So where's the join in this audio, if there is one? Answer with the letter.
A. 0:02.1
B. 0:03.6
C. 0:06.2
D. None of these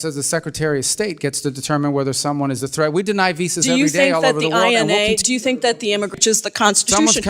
C